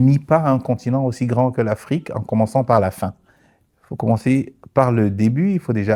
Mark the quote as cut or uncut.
uncut